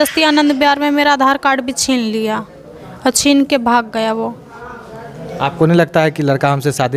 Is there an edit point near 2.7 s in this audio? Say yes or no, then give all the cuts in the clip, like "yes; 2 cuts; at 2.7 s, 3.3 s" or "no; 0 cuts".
no; 0 cuts